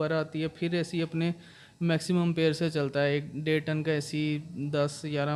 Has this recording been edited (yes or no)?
no